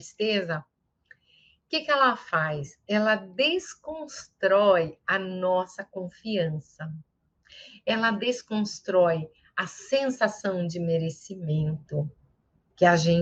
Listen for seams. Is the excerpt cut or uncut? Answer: uncut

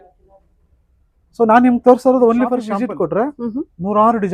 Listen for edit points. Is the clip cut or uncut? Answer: cut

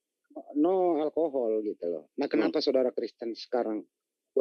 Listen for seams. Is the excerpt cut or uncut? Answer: uncut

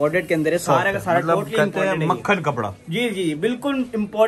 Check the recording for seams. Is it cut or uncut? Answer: uncut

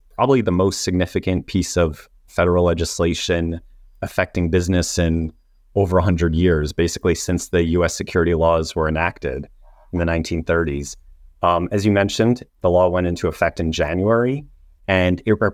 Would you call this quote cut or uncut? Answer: uncut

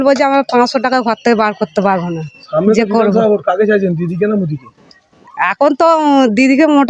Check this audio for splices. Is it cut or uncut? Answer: uncut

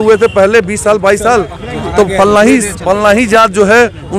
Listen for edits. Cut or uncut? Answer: uncut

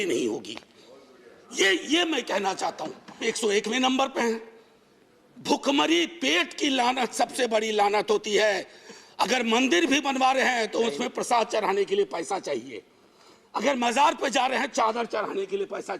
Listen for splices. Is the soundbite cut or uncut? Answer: cut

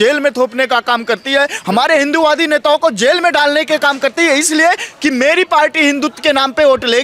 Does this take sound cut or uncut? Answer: uncut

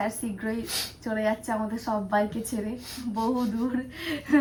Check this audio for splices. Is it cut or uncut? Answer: uncut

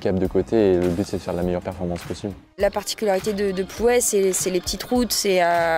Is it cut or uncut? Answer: cut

